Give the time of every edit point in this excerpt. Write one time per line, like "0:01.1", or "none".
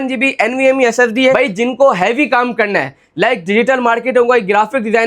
0:01.4